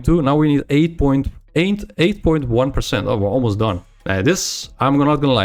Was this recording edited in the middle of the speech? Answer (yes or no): yes